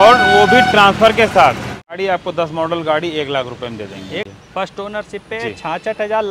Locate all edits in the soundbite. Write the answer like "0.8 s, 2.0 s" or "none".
2.0 s, 4.2 s